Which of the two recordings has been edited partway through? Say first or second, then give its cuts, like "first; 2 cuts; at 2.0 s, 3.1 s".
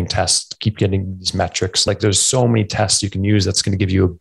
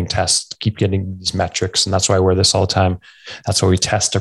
first; 1 cut; at 1.8 s